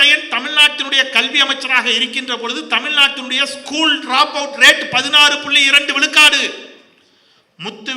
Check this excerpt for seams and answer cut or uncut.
uncut